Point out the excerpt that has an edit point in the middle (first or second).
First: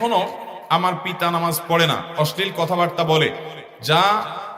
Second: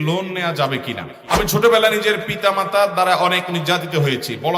second